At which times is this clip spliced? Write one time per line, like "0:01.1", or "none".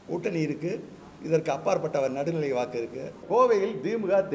0:03.2